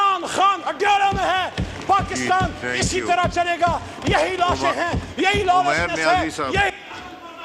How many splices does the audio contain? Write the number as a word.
zero